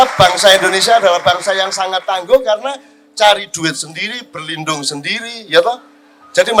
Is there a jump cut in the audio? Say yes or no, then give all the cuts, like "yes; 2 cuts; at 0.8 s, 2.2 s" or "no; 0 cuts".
no; 0 cuts